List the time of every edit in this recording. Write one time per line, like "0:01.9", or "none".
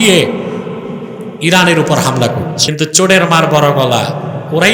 0:02.6